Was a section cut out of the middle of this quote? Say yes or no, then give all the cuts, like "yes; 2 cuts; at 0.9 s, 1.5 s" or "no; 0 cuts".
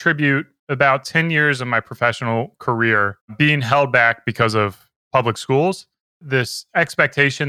yes; 2 cuts; at 3.2 s, 6.2 s